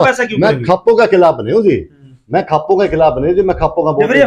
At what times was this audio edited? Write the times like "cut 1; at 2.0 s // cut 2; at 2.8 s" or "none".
none

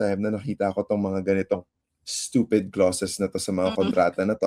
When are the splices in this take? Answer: none

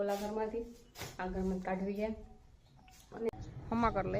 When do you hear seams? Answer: cut 1; at 3.3 s

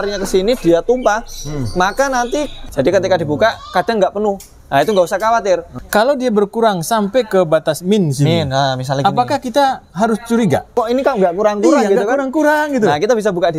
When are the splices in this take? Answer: cut 1; at 2.6 s // cut 2; at 5.7 s // cut 3; at 10.7 s

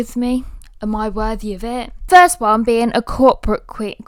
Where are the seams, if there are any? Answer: none

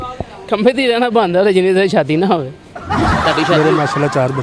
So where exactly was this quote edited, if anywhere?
cut 1; at 3.2 s

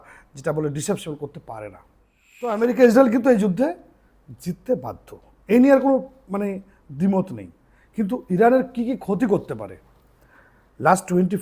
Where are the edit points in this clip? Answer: cut 1; at 2.6 s

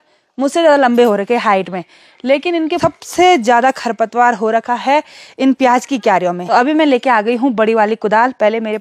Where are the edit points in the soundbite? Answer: cut 1; at 2.8 s // cut 2; at 6.4 s

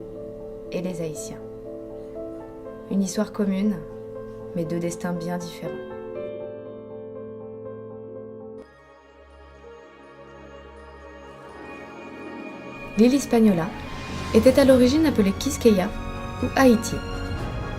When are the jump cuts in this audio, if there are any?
cut 1; at 4.1 s

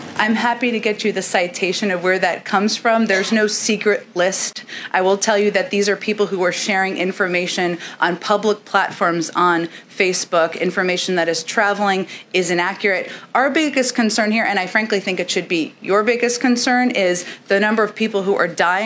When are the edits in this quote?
none

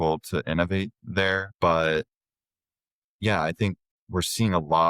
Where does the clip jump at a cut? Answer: cut 1; at 1.4 s // cut 2; at 3.9 s

